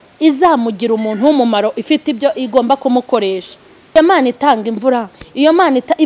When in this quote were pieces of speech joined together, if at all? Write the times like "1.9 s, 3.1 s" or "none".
3.9 s